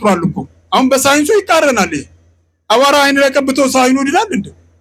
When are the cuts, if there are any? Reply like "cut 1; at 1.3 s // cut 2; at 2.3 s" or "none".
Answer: none